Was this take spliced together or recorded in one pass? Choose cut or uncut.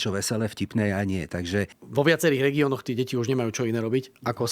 cut